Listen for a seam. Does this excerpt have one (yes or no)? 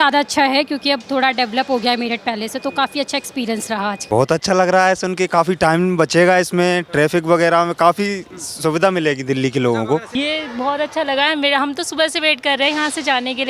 yes